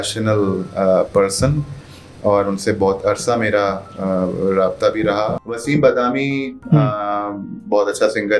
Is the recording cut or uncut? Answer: cut